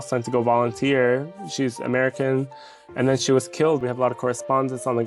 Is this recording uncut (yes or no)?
no